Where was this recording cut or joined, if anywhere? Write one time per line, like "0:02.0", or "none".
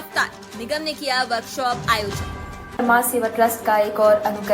0:02.7